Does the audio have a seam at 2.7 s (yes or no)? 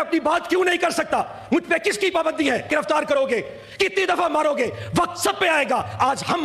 yes